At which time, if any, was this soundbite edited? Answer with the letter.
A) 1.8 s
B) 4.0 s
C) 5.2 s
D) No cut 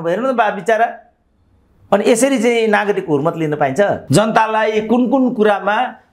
B